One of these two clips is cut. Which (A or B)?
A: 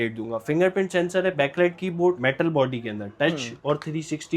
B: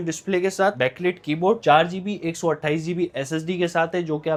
A